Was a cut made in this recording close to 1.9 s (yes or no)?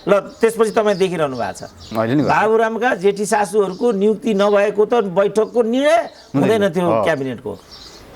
yes